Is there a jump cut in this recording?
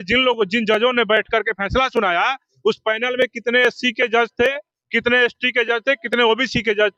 no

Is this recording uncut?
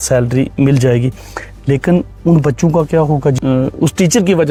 yes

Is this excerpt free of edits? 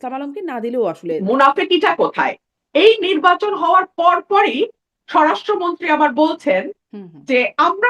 no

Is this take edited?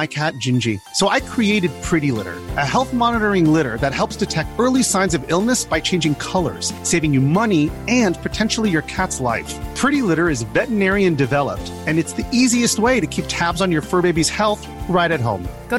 no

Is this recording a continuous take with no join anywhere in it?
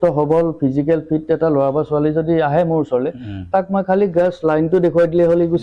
yes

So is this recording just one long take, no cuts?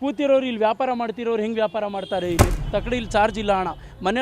no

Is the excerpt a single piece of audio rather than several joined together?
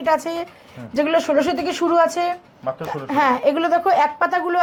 yes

